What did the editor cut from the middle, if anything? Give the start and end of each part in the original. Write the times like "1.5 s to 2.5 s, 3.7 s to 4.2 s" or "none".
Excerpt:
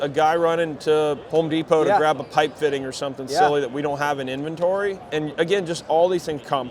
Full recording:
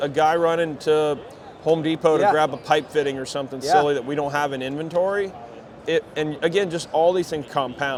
1.2 s to 1.6 s, 5.4 s to 6.1 s